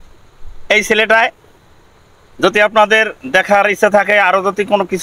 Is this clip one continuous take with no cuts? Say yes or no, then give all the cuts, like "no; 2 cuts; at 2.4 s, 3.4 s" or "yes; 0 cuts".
yes; 0 cuts